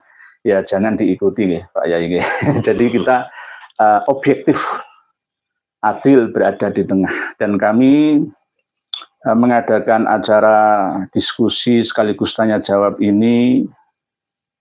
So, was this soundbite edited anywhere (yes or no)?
no